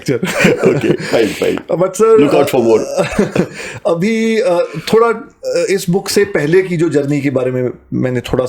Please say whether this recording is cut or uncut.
uncut